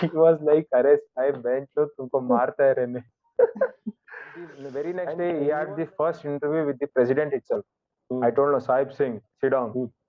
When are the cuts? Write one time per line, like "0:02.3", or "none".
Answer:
0:04.6